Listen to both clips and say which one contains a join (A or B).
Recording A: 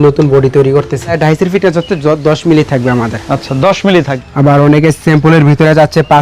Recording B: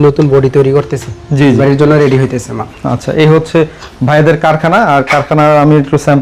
A